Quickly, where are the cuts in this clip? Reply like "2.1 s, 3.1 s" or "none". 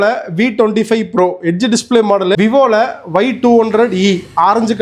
2.4 s